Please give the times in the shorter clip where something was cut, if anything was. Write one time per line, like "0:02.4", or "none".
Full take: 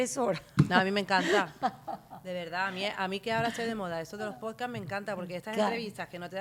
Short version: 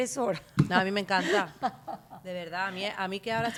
none